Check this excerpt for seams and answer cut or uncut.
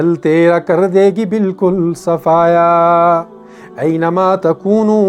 uncut